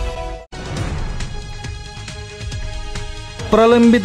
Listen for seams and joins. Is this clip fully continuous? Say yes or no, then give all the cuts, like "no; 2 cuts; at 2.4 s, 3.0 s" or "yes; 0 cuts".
yes; 0 cuts